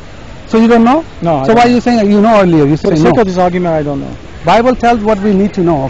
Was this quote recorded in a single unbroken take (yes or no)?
no